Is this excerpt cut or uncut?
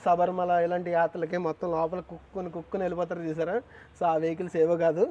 uncut